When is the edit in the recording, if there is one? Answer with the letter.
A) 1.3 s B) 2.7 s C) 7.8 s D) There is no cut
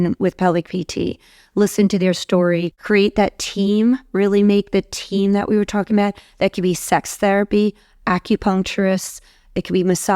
B